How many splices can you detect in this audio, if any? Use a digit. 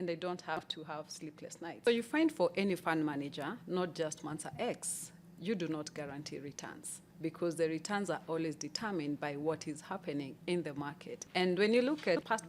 1